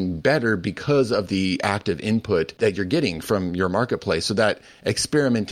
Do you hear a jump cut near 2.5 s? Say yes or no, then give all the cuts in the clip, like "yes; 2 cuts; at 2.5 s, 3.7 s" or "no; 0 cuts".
yes; 1 cut; at 2.5 s